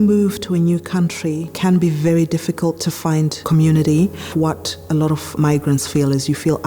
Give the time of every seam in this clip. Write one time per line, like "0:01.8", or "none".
0:01.5
0:03.4